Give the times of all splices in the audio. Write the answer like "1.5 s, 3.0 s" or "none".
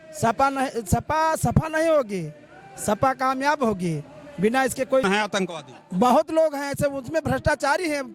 5.0 s